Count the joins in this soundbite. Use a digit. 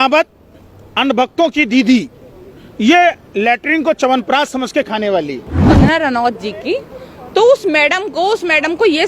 1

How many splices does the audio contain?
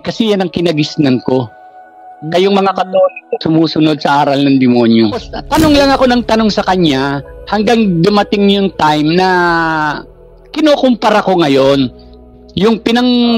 1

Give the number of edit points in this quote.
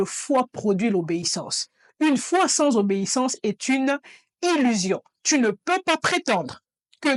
0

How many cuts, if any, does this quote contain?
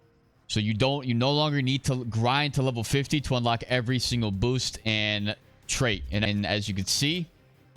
1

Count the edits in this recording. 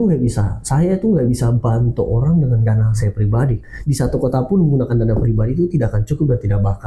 1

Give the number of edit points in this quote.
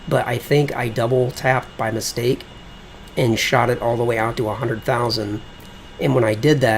1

